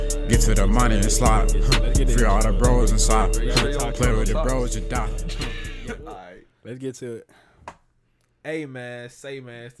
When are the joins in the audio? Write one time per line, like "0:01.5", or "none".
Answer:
0:05.7

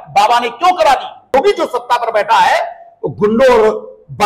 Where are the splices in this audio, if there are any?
0:01.3

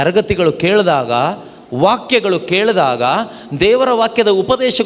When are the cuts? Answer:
none

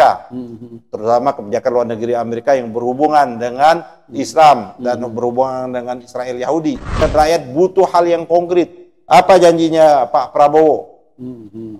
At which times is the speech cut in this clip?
0:07.0

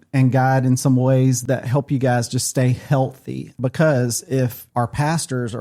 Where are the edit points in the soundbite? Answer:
0:01.4
0:03.5
0:04.6

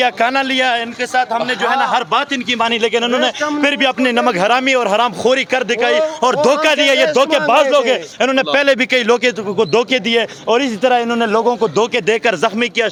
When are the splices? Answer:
none

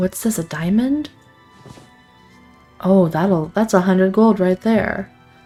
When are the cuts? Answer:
none

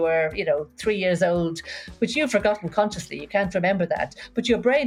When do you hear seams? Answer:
none

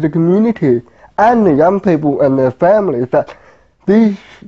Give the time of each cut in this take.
0:01.5

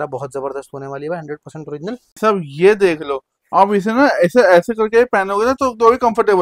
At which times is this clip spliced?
0:02.2

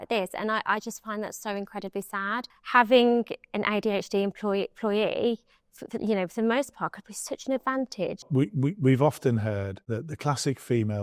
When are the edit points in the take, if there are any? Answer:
0:02.6
0:08.3
0:09.8

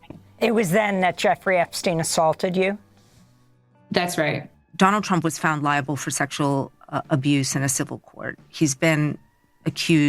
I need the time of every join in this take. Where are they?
0:04.6

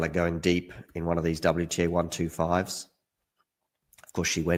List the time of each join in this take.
none

